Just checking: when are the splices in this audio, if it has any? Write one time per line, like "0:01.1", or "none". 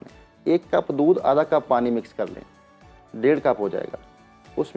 none